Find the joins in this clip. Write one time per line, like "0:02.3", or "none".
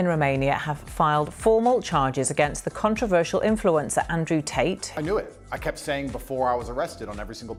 none